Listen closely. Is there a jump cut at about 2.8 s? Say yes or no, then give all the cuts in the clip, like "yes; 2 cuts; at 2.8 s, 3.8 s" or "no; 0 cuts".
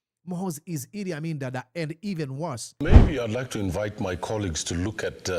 yes; 1 cut; at 2.8 s